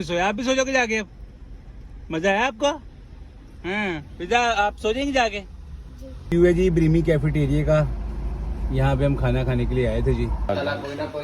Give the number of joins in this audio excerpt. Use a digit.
2